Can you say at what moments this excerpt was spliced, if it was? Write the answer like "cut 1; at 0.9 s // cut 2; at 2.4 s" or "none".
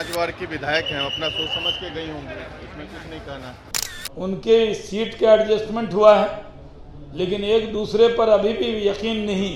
cut 1; at 3.7 s